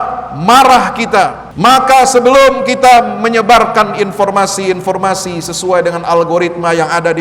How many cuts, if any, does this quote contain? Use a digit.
1